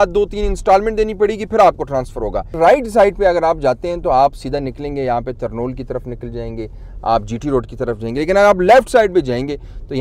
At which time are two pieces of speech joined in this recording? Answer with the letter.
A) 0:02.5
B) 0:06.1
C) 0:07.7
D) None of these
A